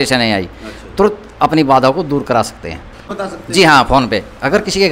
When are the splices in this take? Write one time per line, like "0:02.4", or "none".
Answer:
0:03.1